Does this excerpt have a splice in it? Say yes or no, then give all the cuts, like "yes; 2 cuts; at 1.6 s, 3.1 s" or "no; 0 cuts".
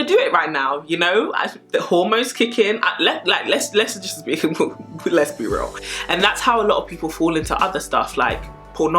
yes; 1 cut; at 5.9 s